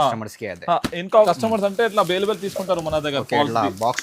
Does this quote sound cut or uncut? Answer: cut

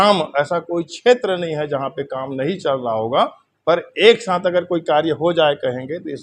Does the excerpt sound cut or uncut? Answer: uncut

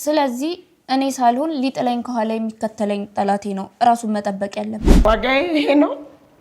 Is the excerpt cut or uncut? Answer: cut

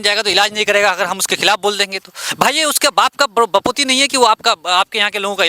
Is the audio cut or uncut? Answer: uncut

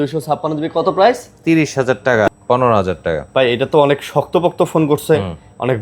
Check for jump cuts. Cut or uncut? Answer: cut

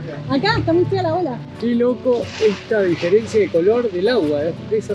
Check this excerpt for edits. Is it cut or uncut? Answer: cut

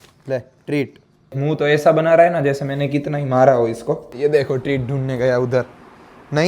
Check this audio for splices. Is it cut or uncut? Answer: cut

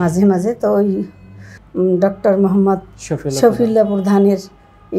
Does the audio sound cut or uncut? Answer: cut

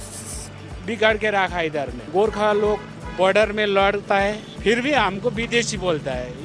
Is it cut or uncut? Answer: cut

